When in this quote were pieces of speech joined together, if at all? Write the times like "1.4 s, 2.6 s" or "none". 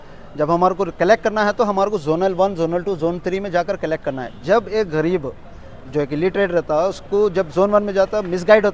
none